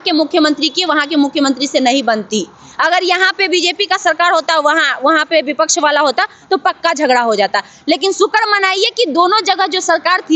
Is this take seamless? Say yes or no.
yes